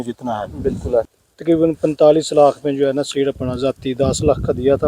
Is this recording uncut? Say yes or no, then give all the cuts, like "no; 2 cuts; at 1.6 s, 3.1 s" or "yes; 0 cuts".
no; 1 cut; at 1.1 s